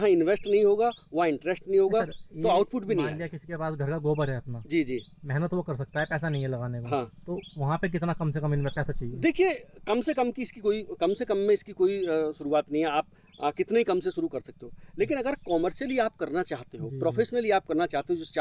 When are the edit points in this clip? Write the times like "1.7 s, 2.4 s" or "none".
none

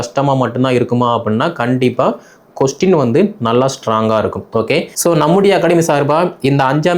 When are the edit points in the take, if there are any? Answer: 4.9 s

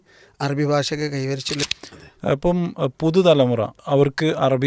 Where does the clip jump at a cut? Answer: 1.7 s

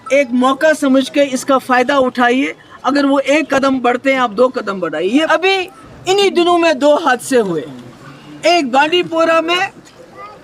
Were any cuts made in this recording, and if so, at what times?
5.3 s

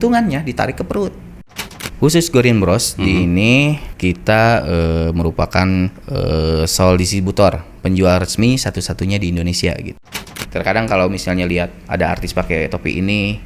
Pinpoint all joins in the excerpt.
1.5 s, 3.9 s, 6.0 s, 10.2 s

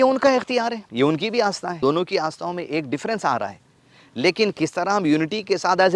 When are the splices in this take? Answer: 0.8 s, 1.8 s

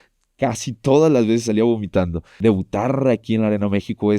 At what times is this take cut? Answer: 2.2 s

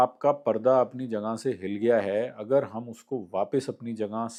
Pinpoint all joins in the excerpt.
none

